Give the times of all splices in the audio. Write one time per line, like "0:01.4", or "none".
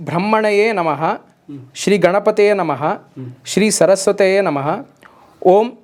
none